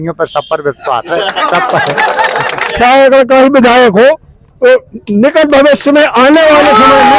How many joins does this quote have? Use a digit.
1